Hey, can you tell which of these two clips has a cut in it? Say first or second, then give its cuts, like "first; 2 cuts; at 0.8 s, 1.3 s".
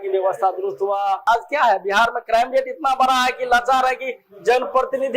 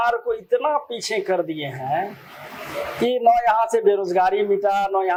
first; 1 cut; at 1.2 s